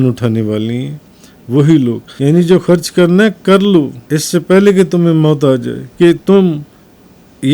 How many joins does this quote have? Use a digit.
3